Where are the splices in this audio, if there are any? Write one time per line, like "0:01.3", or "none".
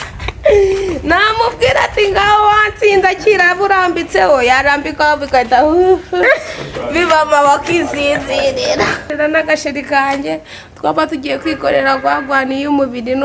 0:09.1